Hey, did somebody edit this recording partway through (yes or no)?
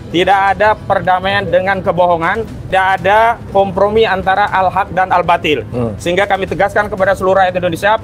yes